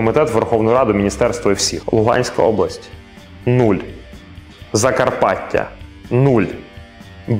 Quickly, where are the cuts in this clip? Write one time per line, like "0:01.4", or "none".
0:01.7